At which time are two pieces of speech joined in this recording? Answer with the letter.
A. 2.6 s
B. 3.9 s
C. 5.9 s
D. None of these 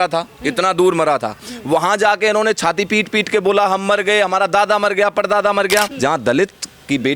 C